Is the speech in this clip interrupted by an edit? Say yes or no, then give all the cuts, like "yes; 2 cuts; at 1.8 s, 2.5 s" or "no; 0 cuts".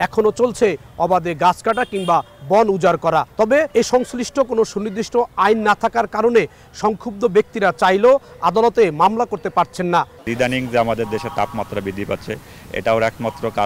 yes; 2 cuts; at 3.5 s, 10.2 s